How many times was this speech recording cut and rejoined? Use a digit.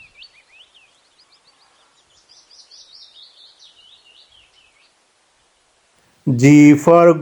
0